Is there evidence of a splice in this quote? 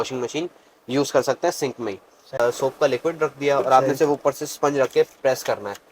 yes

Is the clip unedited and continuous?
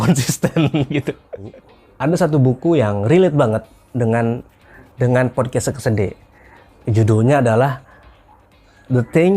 no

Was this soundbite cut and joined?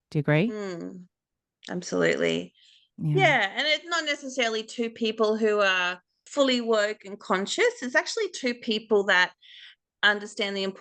yes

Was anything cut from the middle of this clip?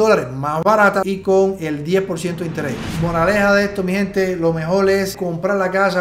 yes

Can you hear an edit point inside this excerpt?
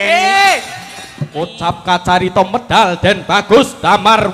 yes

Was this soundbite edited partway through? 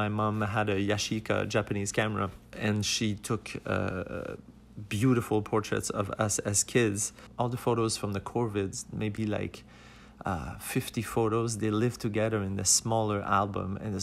yes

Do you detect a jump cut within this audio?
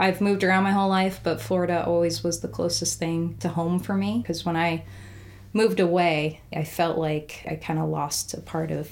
yes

